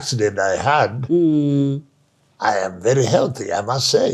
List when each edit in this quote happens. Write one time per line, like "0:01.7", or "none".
none